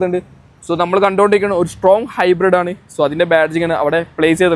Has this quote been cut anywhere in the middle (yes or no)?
no